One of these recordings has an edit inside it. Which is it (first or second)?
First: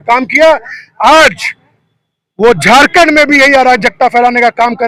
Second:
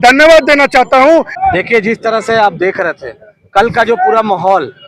second